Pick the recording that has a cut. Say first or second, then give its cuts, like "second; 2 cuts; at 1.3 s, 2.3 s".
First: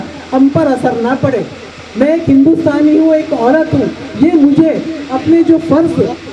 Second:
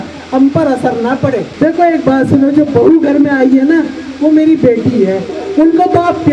second; 2 cuts; at 1.5 s, 5.4 s